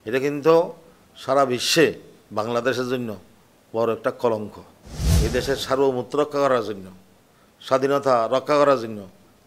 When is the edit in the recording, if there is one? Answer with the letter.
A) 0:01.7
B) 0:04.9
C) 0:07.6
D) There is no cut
B